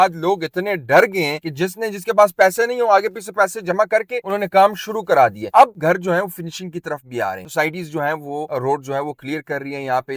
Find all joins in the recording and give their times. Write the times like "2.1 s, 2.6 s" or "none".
none

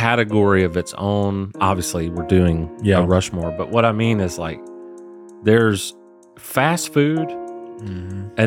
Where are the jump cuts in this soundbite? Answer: none

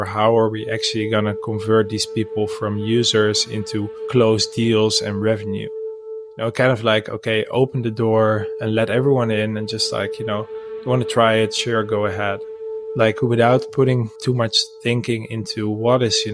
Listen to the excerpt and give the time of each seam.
6.1 s, 12.6 s, 14.2 s

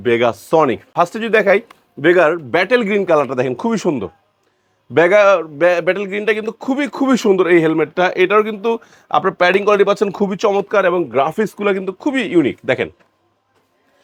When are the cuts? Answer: none

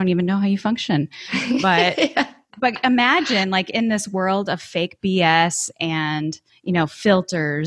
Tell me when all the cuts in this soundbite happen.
6.5 s

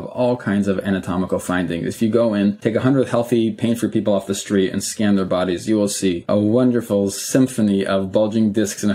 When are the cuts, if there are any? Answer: 2.6 s, 6.3 s

